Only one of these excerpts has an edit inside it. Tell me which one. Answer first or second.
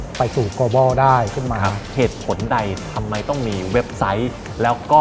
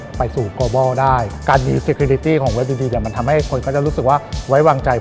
second